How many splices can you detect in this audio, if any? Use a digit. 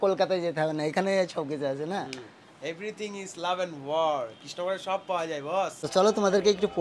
1